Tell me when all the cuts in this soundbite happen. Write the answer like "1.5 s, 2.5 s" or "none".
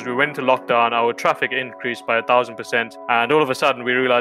2.9 s